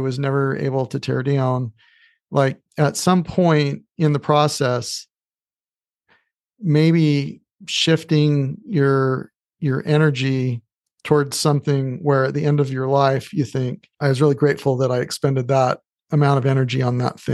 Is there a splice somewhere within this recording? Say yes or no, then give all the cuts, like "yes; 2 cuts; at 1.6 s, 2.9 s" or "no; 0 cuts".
yes; 1 cut; at 13.8 s